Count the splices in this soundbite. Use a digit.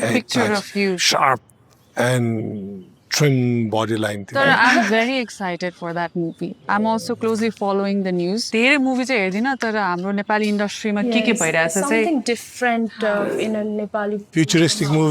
0